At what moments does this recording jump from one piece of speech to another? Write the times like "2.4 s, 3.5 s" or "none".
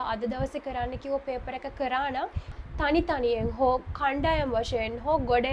2.5 s